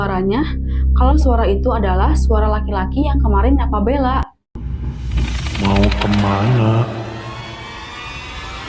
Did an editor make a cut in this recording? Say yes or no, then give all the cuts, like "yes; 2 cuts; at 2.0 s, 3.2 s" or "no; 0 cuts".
yes; 1 cut; at 7.3 s